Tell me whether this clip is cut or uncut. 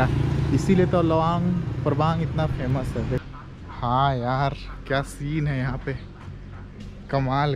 cut